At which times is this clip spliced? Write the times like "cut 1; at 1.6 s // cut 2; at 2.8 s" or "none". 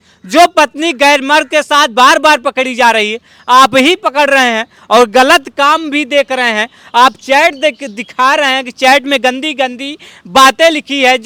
none